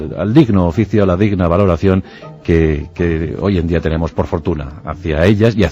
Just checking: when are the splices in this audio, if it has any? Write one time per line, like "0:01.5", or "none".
0:01.5